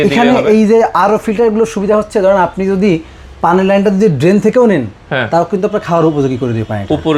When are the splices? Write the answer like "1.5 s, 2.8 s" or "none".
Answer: none